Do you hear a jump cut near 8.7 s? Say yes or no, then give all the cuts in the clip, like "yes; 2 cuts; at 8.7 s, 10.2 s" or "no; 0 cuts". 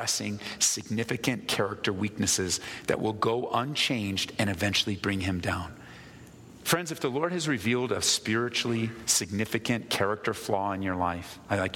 no; 1 cut; at 6.6 s